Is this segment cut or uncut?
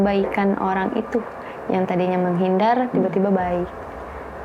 uncut